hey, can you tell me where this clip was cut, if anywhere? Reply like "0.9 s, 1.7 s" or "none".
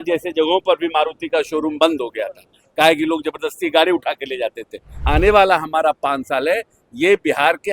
5.0 s